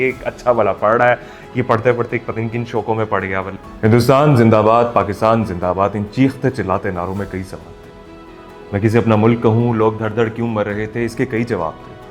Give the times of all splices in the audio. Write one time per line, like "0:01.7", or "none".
0:03.5

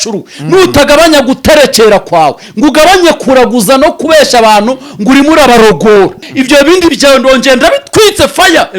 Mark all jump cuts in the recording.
0:06.3

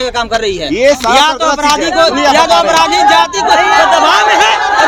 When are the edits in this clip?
none

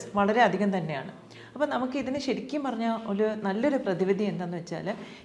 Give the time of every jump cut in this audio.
none

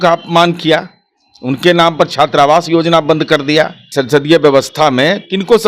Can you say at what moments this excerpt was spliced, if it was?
0:03.8

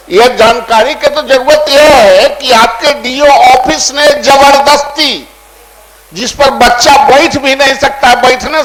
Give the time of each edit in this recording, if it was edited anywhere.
none

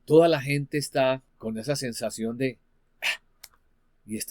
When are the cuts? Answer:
0:01.3

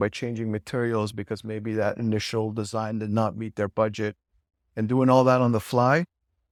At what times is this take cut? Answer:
none

